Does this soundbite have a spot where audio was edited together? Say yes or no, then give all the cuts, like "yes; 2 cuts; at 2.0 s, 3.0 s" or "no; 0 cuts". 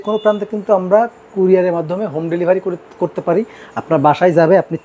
no; 0 cuts